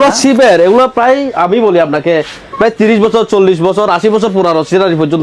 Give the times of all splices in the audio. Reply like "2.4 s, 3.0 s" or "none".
none

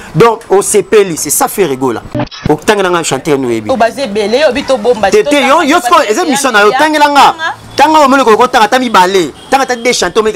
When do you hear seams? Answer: 2.3 s

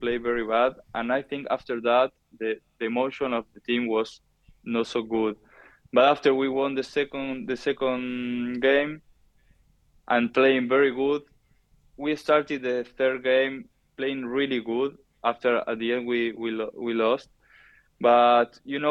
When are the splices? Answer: none

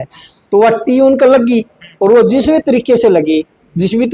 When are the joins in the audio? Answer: none

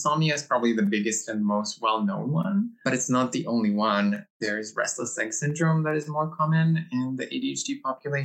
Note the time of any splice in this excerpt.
2.8 s, 4.4 s

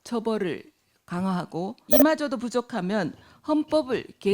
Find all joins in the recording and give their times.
1.8 s

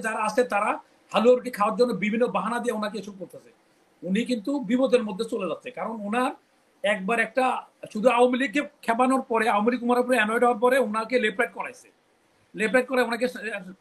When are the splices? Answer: none

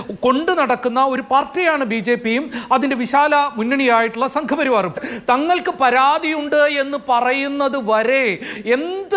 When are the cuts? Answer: 5.0 s

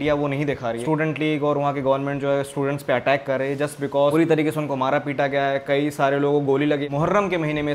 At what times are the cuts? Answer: 0.8 s, 4.1 s, 6.8 s

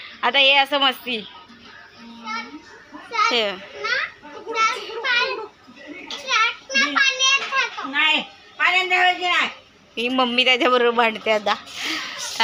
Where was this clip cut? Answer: none

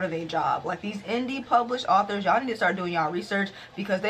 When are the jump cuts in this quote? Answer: none

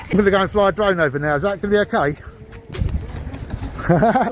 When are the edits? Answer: 2.7 s

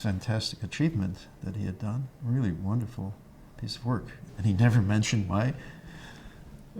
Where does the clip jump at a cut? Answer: 4.2 s

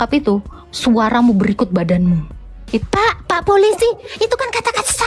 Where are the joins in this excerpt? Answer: 2.8 s

